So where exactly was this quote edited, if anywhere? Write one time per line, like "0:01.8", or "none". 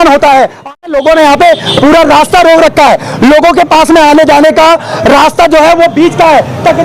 0:00.9